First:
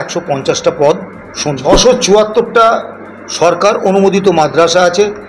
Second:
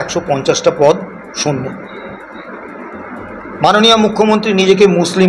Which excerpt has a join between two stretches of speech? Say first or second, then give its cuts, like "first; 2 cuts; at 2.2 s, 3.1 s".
first; 1 cut; at 1.8 s